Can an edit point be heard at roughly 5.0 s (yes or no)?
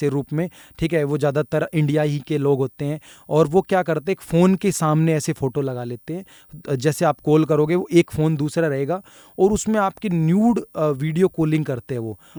no